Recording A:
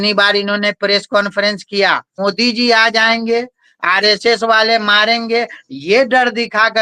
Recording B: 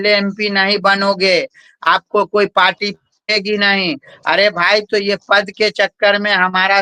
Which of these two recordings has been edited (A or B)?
A